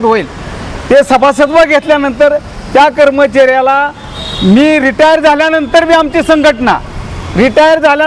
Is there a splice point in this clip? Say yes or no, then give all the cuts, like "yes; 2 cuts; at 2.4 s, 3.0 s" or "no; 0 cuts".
no; 0 cuts